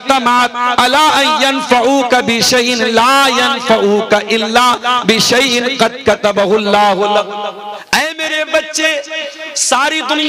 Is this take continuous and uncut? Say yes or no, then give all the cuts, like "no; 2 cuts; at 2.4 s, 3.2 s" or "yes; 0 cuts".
no; 1 cut; at 7.7 s